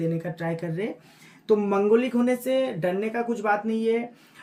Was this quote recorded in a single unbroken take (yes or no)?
yes